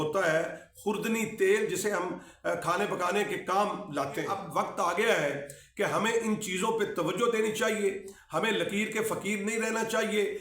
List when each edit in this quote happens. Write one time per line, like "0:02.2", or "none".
0:04.4